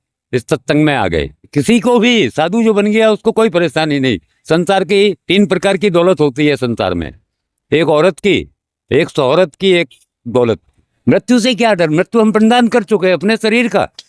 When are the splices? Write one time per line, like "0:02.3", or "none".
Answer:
0:01.4
0:10.8

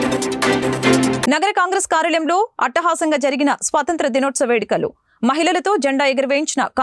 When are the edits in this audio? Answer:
0:01.2

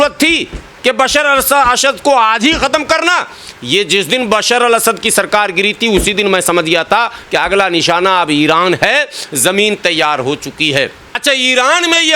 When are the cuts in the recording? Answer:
0:11.1

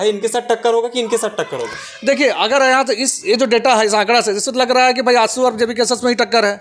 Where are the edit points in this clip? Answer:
none

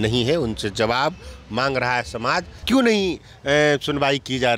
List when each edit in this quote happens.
0:02.6

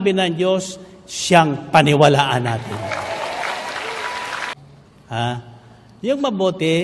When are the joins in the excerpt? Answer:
0:04.5

